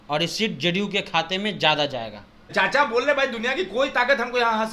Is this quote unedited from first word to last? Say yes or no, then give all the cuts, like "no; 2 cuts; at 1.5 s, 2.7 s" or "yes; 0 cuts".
no; 1 cut; at 2.5 s